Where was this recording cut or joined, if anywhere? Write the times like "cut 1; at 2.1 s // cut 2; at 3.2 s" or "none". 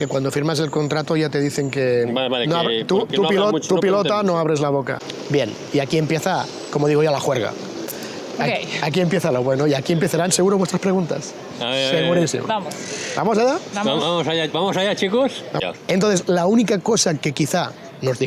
cut 1; at 5.1 s // cut 2; at 15.5 s